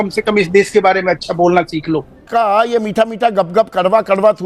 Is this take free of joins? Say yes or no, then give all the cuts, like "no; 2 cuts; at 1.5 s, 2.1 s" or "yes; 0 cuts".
no; 1 cut; at 2.3 s